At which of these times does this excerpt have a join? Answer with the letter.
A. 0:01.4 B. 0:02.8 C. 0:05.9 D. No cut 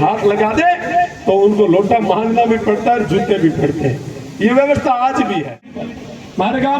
C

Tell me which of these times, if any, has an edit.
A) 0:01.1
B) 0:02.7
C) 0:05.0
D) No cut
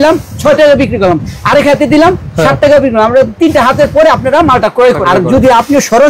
C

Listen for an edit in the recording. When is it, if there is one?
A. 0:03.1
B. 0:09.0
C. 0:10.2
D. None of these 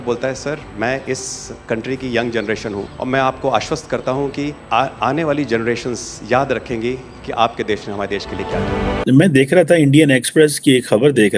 B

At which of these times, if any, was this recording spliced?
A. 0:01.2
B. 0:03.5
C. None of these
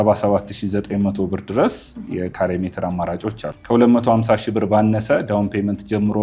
B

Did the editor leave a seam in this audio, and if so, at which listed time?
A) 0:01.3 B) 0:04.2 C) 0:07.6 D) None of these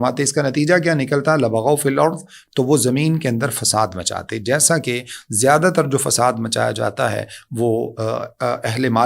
D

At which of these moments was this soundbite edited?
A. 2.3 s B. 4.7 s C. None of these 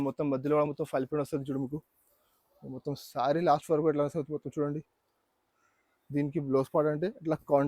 C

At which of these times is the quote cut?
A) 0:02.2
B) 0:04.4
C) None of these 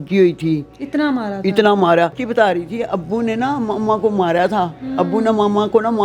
A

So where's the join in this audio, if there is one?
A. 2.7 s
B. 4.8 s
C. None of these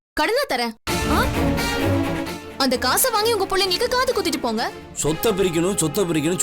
B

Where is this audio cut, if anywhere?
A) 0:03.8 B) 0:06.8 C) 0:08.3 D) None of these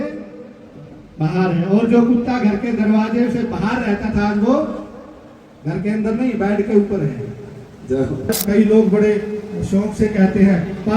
C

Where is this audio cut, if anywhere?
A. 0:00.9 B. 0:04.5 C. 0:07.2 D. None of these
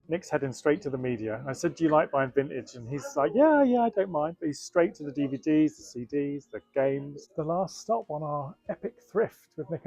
C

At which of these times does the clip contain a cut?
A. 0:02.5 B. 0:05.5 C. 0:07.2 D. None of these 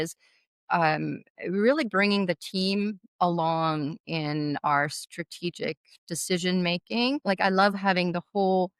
C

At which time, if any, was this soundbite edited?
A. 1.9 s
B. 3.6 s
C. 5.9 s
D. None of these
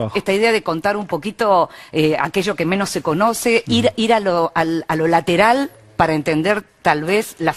B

